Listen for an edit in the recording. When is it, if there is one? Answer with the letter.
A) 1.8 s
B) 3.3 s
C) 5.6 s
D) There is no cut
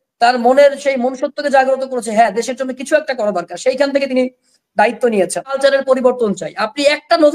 C